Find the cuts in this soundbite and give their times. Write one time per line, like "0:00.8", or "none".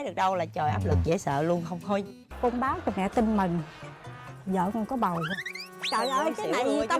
0:02.3

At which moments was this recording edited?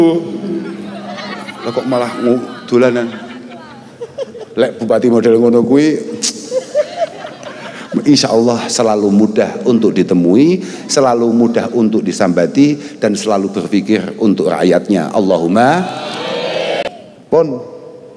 0:16.8

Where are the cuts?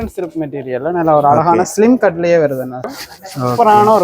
0:02.8

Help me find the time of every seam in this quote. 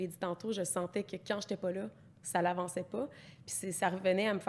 none

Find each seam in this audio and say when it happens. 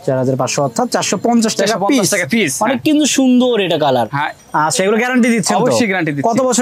0:04.4

